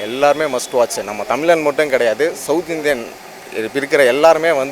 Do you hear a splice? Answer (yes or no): no